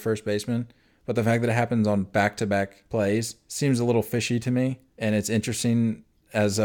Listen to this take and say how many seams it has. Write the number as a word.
three